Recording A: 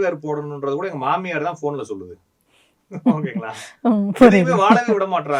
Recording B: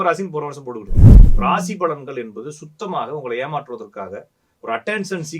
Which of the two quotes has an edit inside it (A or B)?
B